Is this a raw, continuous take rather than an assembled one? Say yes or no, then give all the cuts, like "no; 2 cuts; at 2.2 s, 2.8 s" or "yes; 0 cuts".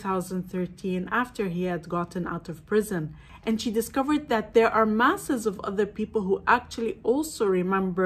no; 1 cut; at 3.2 s